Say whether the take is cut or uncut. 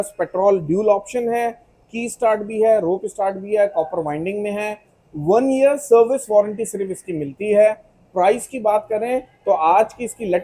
uncut